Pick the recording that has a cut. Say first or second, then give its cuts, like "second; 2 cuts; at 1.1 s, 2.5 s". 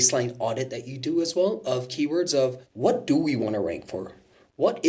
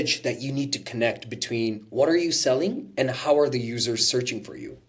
first; 1 cut; at 2.7 s